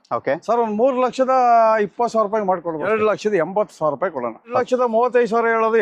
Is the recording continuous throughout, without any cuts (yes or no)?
no